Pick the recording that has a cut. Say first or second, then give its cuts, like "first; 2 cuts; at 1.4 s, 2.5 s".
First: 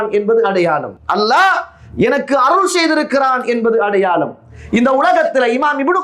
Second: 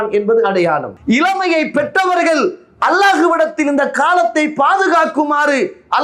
second; 1 cut; at 0.9 s